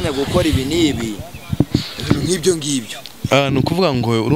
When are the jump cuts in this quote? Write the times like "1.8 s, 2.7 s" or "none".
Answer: none